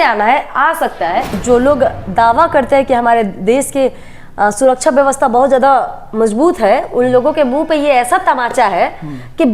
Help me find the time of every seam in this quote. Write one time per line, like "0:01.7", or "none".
0:01.4